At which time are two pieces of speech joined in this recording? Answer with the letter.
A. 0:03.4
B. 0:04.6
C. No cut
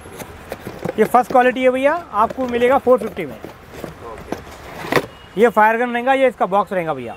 C